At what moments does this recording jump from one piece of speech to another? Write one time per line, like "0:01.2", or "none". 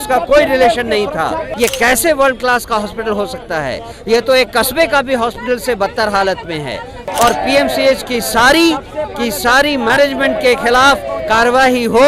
0:01.5
0:07.1

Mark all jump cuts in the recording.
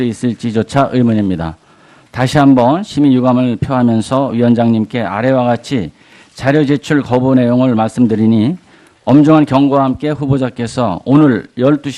none

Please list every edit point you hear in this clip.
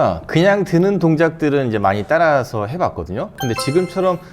0:03.4

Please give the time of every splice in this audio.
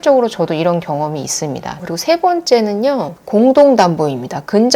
0:01.8

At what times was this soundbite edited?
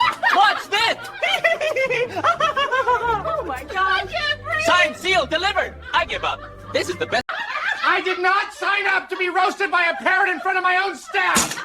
0:07.3

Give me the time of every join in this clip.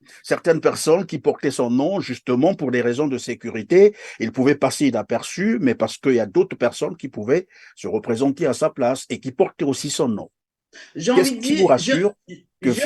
none

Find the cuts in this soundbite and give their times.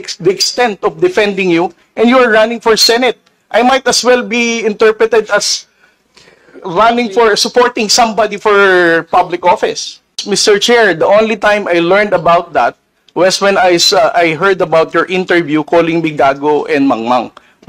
0:10.2

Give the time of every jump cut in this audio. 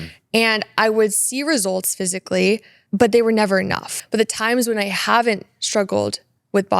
0:02.7
0:03.9

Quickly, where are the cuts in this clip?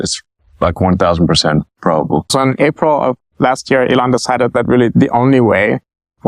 0:02.3

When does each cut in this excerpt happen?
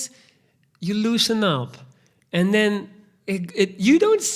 none

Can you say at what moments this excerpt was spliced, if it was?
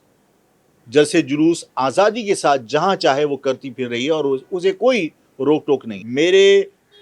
0:05.9

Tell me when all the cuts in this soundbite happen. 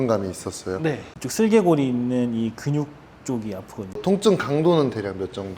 0:01.0
0:03.9

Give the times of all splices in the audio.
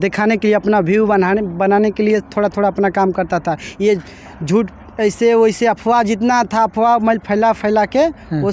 none

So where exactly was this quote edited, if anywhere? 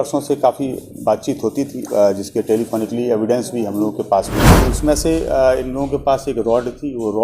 0:04.4

